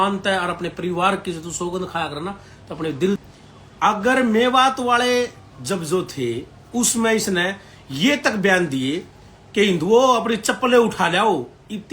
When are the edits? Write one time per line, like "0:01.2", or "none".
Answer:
0:03.2